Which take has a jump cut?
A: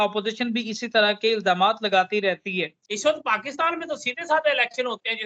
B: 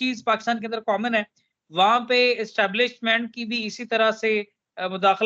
A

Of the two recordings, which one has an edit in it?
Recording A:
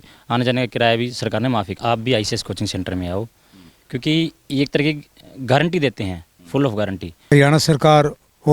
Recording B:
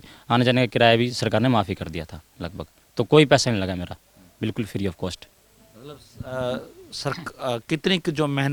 A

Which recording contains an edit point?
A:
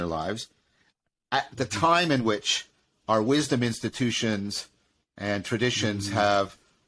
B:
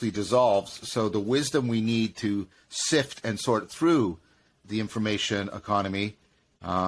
B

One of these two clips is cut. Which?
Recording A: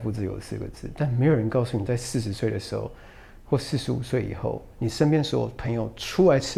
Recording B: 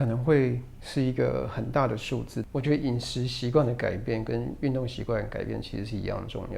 B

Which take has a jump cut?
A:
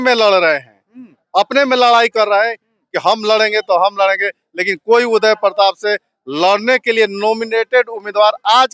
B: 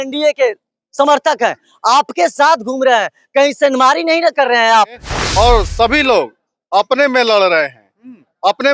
B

